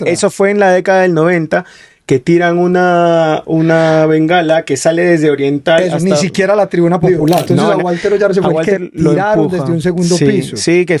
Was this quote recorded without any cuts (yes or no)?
no